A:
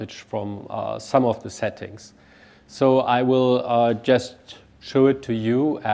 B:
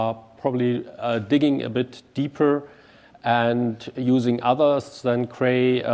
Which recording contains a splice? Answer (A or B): B